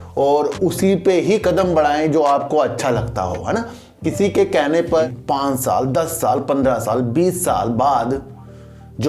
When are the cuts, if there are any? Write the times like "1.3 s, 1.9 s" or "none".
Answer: 5.1 s